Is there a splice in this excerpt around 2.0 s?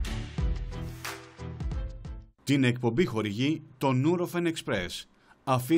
yes; 2 cuts; at 1.2 s, 2.0 s

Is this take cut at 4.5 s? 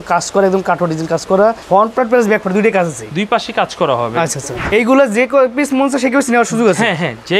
yes; 2 cuts; at 1.6 s, 4.5 s

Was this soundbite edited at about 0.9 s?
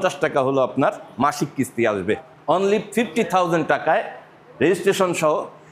no; 1 cut; at 2.2 s

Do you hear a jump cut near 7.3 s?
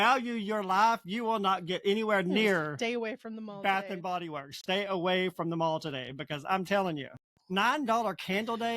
yes; 1 cut; at 7.3 s

